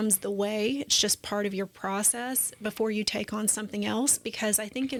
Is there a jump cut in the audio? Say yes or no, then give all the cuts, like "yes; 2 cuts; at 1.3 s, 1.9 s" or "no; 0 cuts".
no; 0 cuts